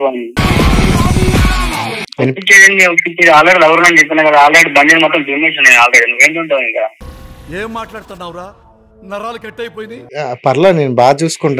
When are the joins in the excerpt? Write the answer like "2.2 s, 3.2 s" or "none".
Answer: 2.0 s